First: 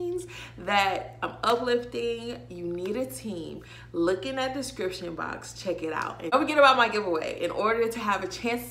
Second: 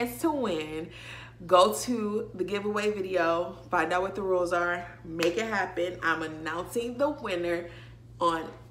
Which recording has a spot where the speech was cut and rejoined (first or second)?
first